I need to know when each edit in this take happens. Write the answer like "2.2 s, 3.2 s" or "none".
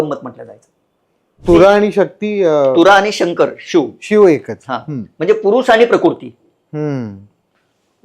1.4 s